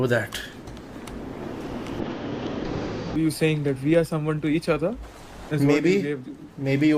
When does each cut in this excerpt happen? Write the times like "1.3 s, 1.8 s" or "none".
3.1 s